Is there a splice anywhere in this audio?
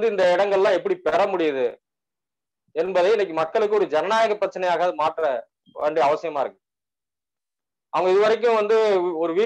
no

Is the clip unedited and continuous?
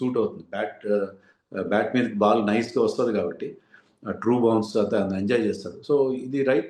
yes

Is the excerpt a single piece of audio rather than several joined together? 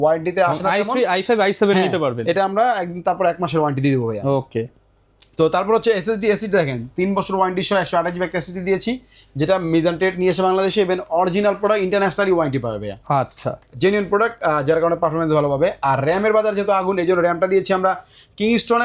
yes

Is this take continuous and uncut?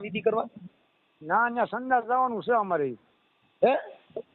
yes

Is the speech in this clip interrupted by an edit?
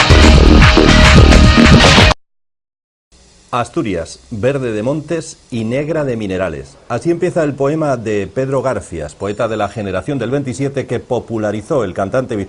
no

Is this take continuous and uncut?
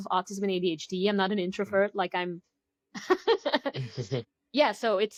yes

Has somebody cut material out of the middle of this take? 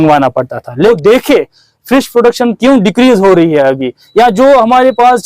yes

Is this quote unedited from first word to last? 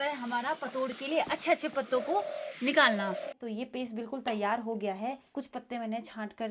no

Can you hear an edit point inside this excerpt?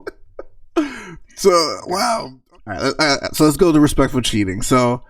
yes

